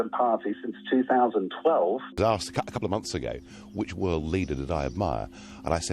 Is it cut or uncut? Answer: cut